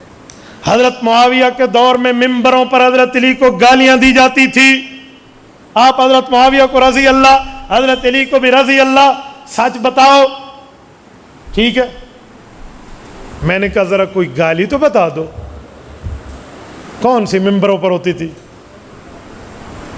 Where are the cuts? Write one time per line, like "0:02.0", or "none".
none